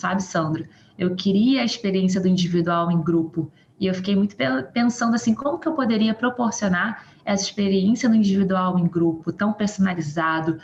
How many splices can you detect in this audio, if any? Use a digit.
0